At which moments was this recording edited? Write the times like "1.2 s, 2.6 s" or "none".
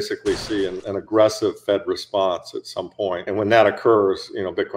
0.8 s, 3.3 s